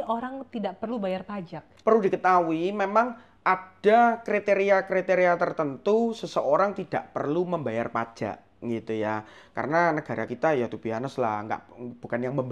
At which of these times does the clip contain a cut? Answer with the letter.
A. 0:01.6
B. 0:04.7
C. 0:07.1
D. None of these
A